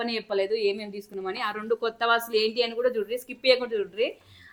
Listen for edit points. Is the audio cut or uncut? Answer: uncut